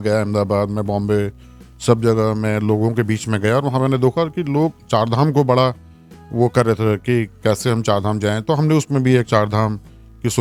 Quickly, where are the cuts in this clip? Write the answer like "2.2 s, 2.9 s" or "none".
none